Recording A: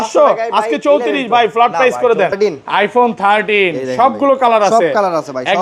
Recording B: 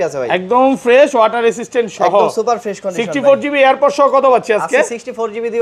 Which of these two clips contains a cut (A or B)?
A